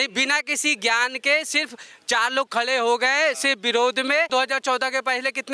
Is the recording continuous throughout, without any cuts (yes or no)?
no